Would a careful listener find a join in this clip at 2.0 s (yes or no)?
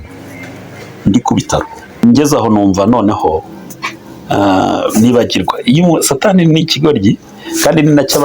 yes